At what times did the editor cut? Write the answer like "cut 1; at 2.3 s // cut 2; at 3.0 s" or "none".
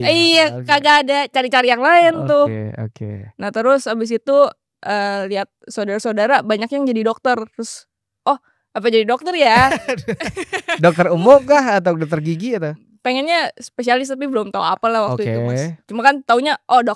none

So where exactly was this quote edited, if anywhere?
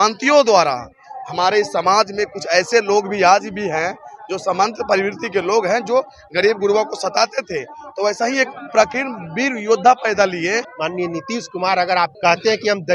cut 1; at 10.7 s // cut 2; at 12.1 s

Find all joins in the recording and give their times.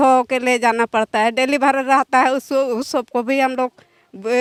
none

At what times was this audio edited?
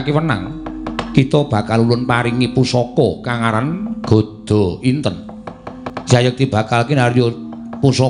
cut 1; at 5.9 s

